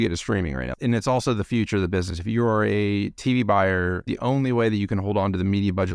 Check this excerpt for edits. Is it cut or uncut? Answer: cut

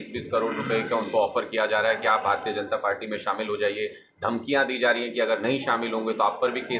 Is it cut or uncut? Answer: uncut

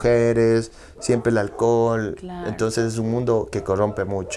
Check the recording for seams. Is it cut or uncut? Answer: uncut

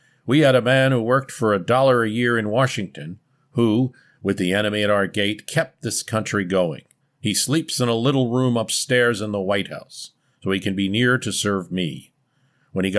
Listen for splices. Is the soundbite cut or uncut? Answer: uncut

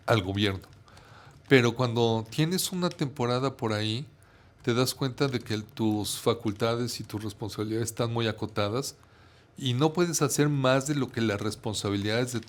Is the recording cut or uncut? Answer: uncut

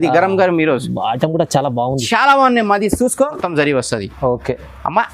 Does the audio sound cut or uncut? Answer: cut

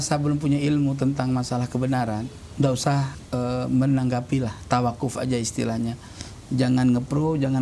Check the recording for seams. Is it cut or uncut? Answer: cut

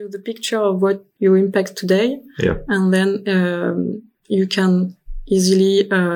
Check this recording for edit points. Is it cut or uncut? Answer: cut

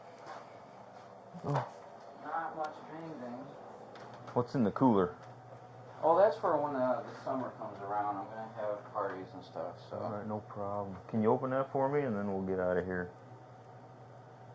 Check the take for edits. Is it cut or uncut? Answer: cut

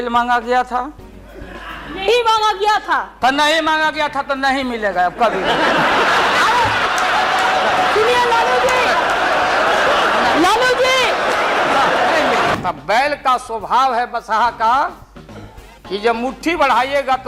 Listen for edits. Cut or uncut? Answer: cut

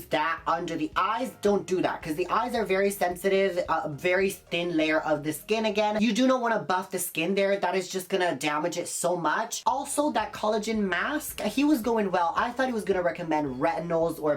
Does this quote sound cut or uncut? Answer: uncut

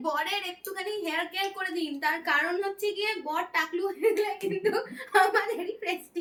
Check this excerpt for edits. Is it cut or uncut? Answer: uncut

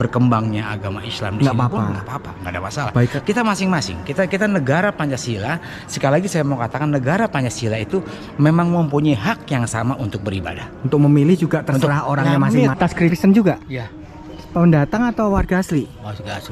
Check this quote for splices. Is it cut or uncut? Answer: cut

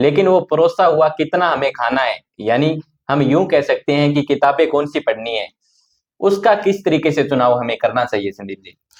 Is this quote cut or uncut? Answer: uncut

